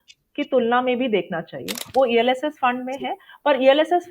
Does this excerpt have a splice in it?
yes; 1 cut; at 1.7 s

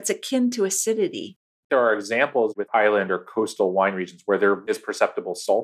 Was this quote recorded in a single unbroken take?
no; 3 cuts; at 1.7 s, 2.6 s, 4.7 s

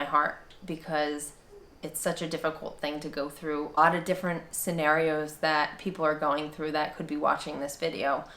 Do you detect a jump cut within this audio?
yes; 1 cut; at 3.8 s

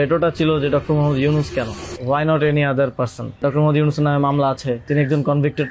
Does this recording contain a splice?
yes; 3 cuts; at 1.9 s, 3.4 s, 4.8 s

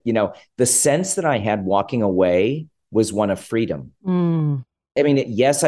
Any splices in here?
yes; 2 cuts; at 2.7 s, 4.9 s

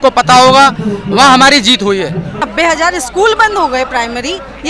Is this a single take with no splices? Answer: no; 1 cut; at 2.4 s

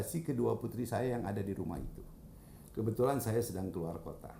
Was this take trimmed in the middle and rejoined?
no; 0 cuts

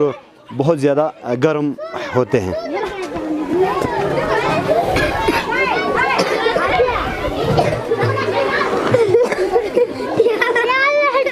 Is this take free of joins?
yes; 0 cuts

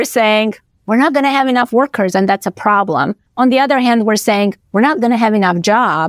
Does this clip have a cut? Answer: no; 0 cuts

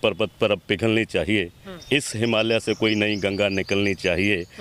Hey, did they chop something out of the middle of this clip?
no; 0 cuts

